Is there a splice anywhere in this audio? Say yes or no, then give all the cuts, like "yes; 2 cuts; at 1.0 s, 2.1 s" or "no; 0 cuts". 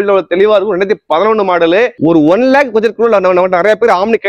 yes; 1 cut; at 1.9 s